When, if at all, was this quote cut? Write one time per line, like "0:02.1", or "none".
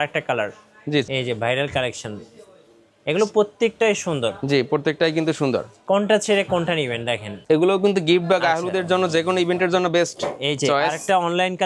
0:01.1
0:07.4